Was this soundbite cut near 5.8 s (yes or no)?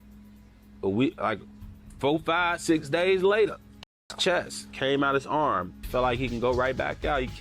yes